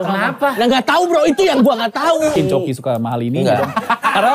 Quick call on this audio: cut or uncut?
cut